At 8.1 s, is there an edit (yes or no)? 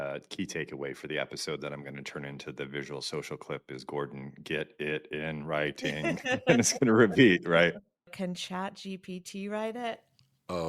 yes